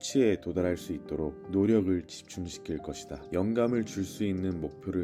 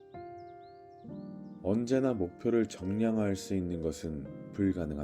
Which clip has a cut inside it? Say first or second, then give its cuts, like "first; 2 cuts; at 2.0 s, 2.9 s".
second; 1 cut; at 1.0 s